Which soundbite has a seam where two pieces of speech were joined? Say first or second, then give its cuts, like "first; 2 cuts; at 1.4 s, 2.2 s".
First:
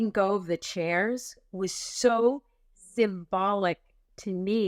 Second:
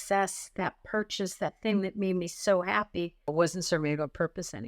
second; 1 cut; at 3.3 s